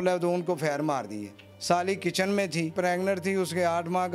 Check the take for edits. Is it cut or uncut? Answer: cut